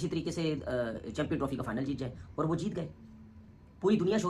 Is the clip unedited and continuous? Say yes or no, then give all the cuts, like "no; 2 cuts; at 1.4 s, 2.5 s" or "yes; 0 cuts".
yes; 0 cuts